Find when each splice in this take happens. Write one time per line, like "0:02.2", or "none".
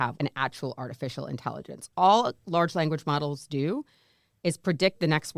none

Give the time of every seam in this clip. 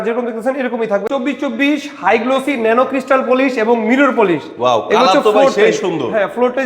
0:01.1

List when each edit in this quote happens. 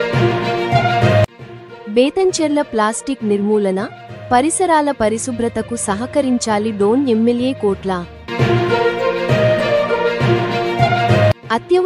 0:01.3

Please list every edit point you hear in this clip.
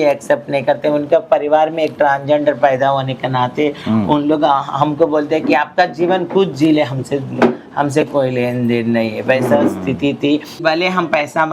0:10.6

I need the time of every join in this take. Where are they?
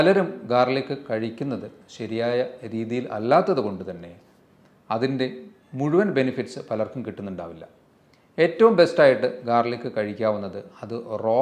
none

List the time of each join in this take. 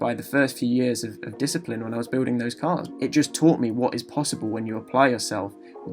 0:02.9

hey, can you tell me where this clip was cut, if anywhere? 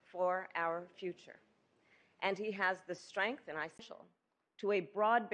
none

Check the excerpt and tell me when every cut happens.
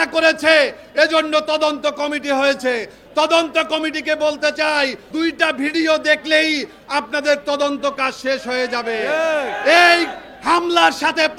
0:05.0

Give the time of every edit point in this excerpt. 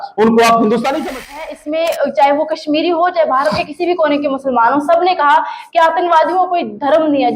0:01.3

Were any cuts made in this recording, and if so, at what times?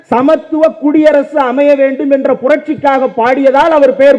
none

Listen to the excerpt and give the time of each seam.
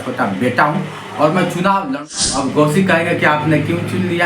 0:02.0

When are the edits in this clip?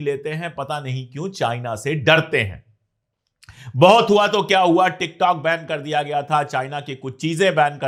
none

